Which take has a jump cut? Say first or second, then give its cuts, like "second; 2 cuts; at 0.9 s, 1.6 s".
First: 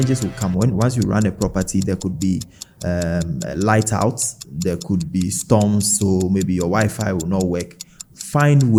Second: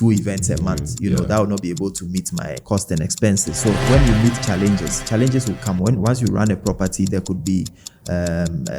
second; 2 cuts; at 2.6 s, 3.8 s